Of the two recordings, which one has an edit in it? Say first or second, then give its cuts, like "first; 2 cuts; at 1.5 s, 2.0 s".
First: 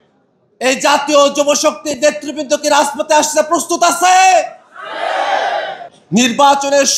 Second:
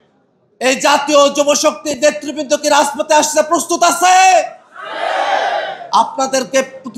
first; 1 cut; at 5.8 s